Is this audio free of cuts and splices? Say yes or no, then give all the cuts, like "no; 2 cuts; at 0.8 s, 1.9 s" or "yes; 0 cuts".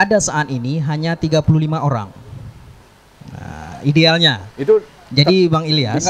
yes; 0 cuts